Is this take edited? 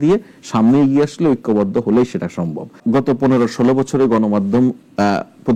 yes; 1 cut; at 2.8 s

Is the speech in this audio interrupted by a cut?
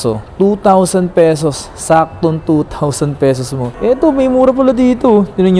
yes; 1 cut; at 3.7 s

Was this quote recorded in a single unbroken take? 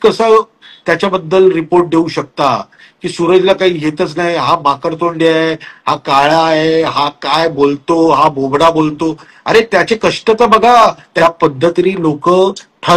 no; 1 cut; at 11.1 s

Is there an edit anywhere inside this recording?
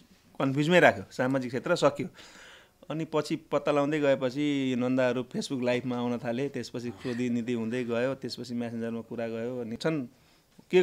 yes; 1 cut; at 9.8 s

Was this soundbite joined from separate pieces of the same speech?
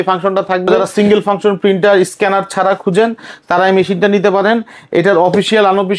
yes; 1 cut; at 0.9 s

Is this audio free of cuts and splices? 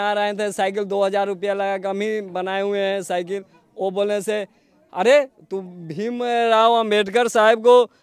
yes; 0 cuts

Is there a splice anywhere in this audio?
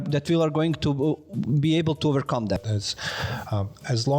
yes; 1 cut; at 2.6 s

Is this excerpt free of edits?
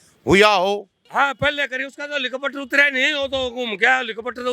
no; 1 cut; at 1.0 s

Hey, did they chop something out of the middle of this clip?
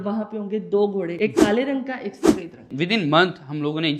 yes; 1 cut; at 2.7 s

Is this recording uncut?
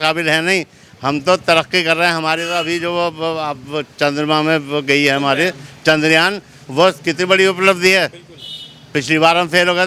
yes; 0 cuts

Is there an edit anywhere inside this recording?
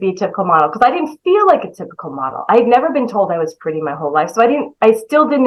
no; 0 cuts

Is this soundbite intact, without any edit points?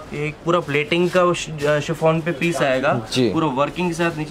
yes; 0 cuts

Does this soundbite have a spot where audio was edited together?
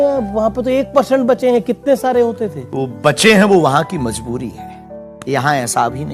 yes; 1 cut; at 5.1 s

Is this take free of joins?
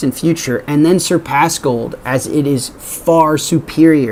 yes; 0 cuts

